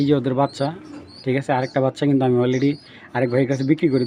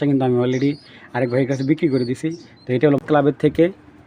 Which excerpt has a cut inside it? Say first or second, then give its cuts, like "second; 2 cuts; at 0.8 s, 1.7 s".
second; 1 cut; at 3.0 s